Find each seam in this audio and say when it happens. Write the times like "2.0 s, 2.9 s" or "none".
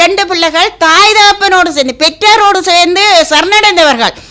none

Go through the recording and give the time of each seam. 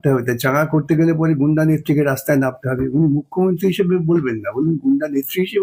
none

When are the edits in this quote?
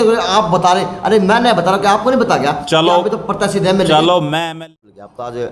4.6 s

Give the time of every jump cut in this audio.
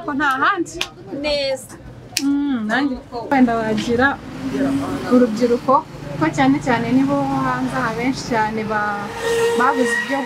3.3 s

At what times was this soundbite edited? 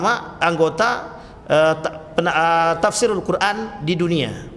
none

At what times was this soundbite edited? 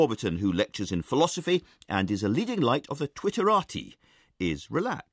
3.3 s

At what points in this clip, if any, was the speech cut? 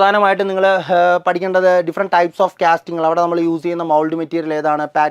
none

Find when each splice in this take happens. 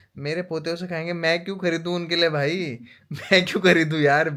none

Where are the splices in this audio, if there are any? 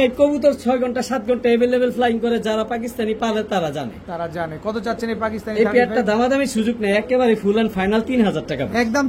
none

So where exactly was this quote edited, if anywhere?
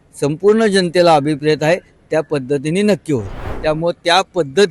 3.5 s

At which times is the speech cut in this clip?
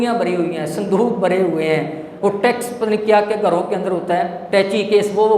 4.4 s

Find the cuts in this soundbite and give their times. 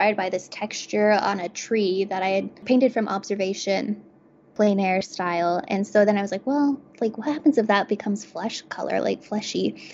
2.6 s, 4.5 s

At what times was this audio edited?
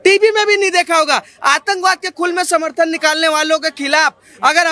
none

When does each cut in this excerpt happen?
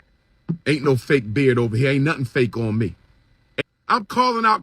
3.6 s

